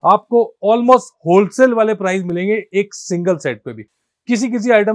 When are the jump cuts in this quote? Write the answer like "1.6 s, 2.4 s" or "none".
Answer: none